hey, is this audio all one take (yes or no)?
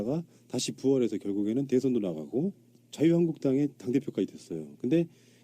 no